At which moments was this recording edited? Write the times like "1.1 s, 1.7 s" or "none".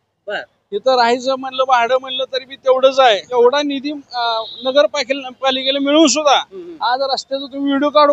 3.4 s

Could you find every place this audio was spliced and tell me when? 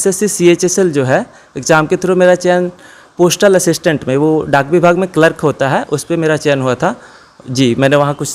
none

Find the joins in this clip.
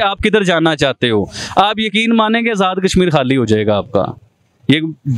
none

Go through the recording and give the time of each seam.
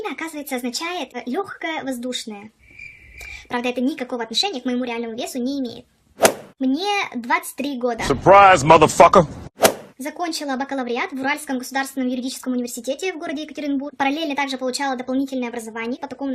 5.5 s

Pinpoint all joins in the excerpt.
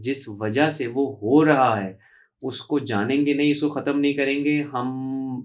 none

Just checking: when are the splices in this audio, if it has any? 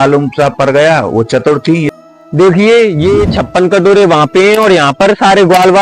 1.9 s

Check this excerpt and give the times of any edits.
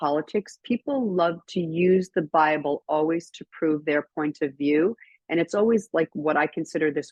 none

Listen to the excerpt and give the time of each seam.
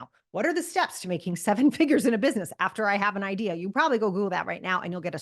none

